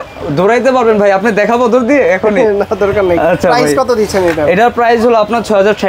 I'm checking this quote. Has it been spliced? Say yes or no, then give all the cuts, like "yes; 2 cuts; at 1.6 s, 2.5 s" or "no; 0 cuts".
no; 0 cuts